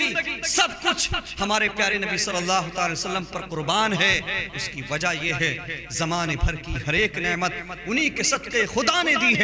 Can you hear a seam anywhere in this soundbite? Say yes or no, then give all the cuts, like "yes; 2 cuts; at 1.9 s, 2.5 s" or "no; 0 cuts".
no; 0 cuts